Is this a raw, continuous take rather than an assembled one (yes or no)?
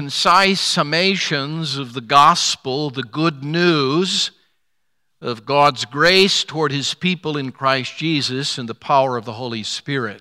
yes